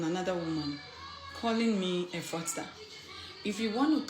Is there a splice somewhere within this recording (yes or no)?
no